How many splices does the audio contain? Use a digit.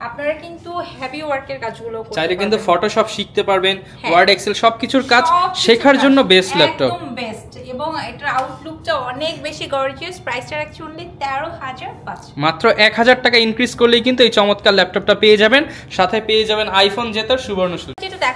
0